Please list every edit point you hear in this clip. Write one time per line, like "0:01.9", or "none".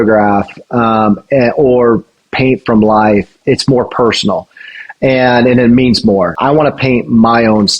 0:06.3

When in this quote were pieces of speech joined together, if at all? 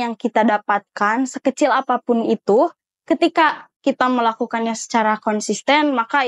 none

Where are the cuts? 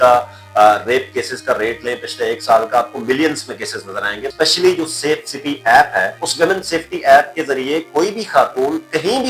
0:04.3
0:06.2

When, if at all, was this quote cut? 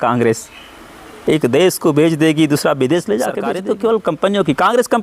0:03.5

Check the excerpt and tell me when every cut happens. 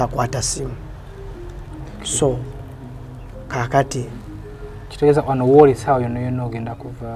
none

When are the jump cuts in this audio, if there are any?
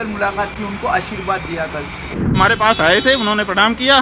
0:02.3

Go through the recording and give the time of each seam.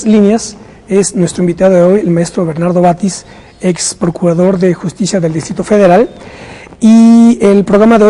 none

